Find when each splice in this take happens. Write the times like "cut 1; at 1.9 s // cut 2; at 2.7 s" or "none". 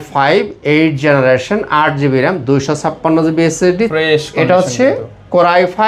cut 1; at 3.9 s